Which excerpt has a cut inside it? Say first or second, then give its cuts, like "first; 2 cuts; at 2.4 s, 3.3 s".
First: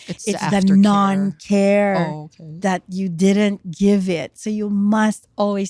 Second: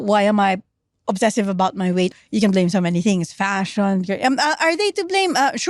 second; 1 cut; at 2.1 s